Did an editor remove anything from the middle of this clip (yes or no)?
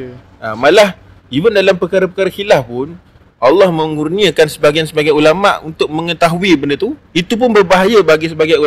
yes